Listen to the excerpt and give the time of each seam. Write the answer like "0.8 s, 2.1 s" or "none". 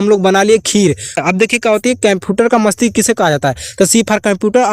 1.2 s